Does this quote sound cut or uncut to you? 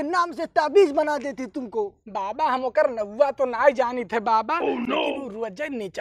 uncut